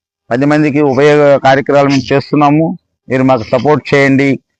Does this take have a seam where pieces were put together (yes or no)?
no